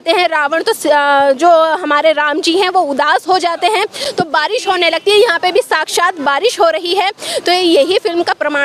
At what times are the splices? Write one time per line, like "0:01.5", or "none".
none